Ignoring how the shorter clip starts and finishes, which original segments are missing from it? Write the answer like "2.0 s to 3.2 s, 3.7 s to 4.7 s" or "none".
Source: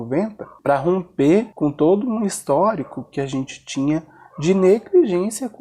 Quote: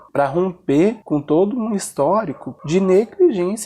3.0 s to 4.2 s